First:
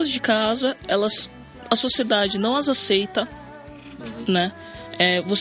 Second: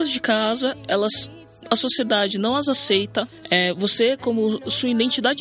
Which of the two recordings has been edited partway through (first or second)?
second